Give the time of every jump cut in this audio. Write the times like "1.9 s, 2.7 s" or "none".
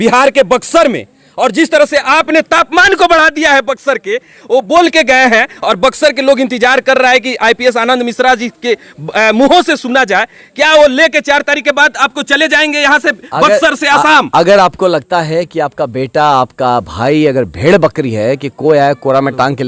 none